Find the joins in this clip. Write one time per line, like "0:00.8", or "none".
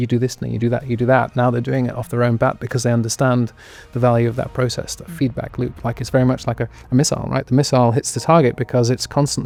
none